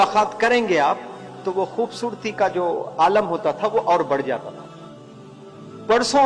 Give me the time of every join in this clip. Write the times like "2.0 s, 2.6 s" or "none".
none